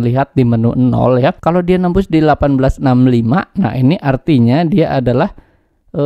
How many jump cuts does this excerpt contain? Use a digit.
1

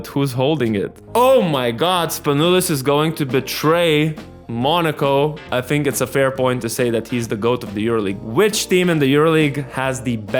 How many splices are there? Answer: 3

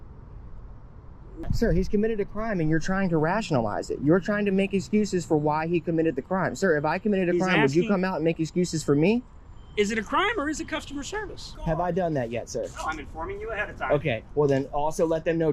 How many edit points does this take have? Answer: 2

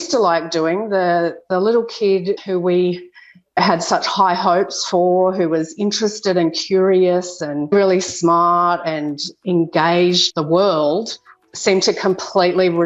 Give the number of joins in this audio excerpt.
3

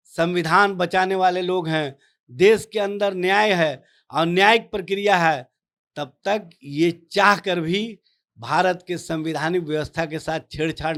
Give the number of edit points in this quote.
0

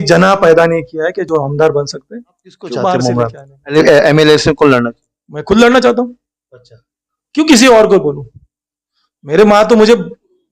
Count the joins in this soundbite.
1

